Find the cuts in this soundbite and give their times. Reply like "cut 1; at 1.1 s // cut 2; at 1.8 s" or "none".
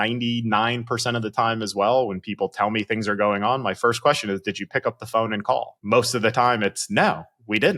cut 1; at 5.8 s